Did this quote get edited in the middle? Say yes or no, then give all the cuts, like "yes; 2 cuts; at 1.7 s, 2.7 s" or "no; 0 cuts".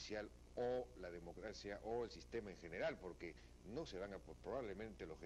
no; 0 cuts